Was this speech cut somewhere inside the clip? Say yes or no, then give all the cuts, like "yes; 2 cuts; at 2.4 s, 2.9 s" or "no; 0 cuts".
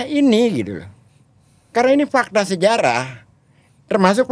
no; 0 cuts